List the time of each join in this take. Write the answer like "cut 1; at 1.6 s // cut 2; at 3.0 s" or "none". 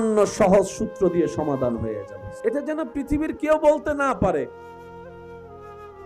cut 1; at 2.1 s